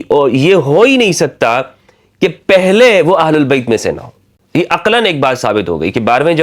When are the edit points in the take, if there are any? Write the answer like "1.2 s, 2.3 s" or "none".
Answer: none